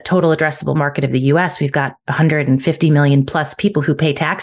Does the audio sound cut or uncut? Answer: uncut